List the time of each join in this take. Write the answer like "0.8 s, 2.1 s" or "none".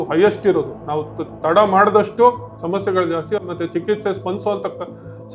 2.5 s